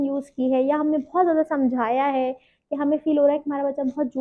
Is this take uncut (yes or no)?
yes